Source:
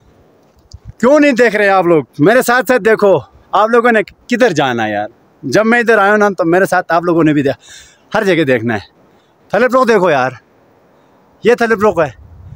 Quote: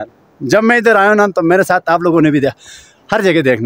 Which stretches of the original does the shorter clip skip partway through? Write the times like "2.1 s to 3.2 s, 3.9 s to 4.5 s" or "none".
none